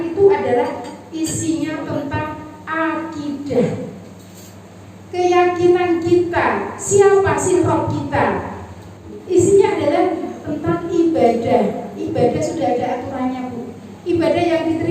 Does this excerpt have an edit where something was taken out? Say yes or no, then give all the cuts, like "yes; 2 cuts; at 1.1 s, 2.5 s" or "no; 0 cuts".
yes; 1 cut; at 9.1 s